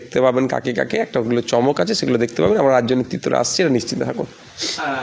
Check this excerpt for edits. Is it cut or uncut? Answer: uncut